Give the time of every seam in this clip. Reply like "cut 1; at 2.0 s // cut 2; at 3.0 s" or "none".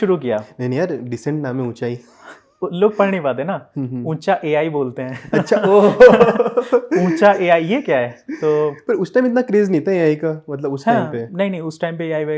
none